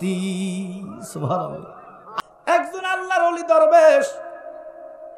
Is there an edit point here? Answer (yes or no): yes